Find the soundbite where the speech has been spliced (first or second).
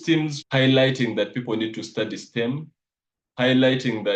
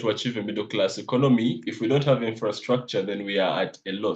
second